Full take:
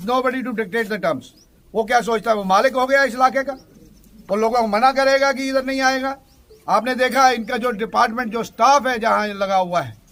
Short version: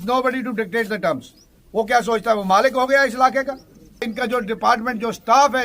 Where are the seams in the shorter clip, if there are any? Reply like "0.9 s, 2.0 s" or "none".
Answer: 4.1 s